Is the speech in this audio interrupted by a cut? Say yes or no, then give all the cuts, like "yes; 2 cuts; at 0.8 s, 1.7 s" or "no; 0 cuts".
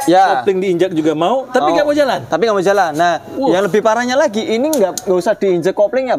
no; 0 cuts